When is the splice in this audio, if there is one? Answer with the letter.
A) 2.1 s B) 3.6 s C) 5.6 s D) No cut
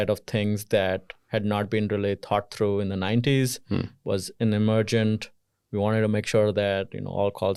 D